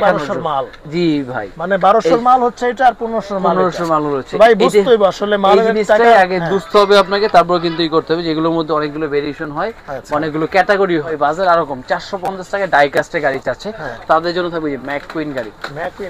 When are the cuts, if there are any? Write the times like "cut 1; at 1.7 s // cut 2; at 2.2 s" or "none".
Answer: cut 1; at 11.1 s

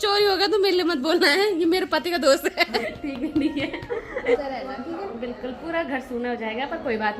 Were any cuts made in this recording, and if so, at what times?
cut 1; at 2.8 s // cut 2; at 4.4 s

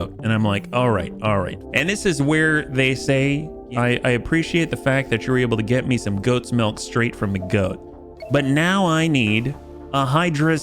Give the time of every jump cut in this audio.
cut 1; at 1.6 s // cut 2; at 3.6 s

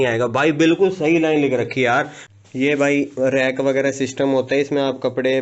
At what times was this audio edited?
cut 1; at 2.2 s

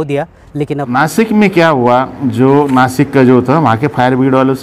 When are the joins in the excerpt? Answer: cut 1; at 0.9 s

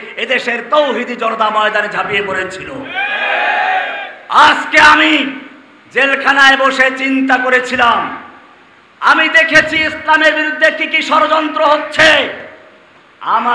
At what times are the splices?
none

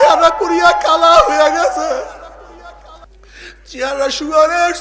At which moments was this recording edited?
cut 1; at 3.0 s

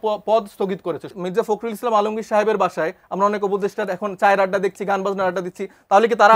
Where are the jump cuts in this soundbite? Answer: cut 1; at 1.1 s

